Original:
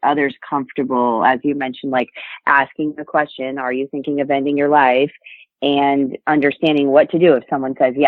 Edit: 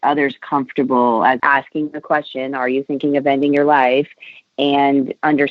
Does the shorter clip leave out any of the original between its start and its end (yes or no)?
yes